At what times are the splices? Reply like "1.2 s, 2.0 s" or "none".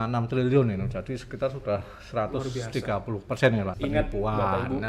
3.7 s